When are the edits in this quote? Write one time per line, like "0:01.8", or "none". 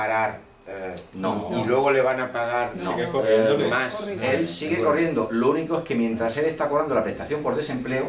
0:01.0